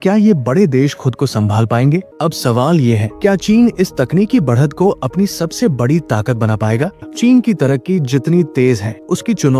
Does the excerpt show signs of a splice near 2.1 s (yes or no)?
yes